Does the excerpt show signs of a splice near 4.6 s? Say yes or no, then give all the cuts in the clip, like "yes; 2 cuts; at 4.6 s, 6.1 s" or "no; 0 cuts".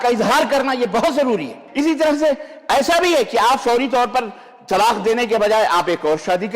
no; 1 cut; at 1.6 s